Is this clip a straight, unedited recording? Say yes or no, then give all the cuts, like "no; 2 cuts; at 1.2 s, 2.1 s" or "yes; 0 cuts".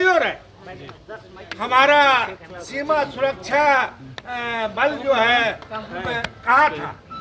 yes; 0 cuts